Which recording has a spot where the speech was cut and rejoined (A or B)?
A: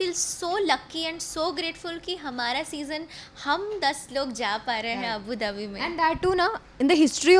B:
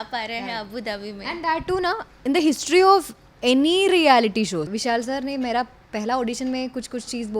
B